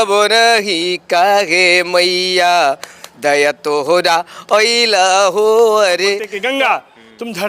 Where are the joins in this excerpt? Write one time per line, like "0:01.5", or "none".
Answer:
0:06.3